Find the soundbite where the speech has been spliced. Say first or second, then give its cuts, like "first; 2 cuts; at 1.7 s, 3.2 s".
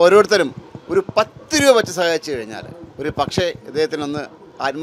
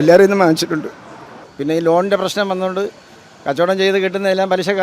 second; 1 cut; at 1.5 s